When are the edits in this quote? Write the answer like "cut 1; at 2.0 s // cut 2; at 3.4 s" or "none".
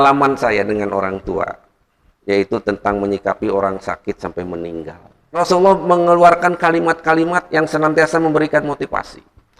cut 1; at 5.4 s